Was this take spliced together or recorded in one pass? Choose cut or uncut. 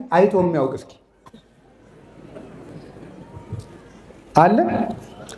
uncut